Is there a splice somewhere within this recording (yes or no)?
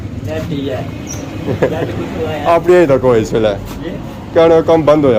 no